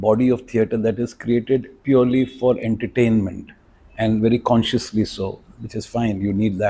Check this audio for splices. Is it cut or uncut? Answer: uncut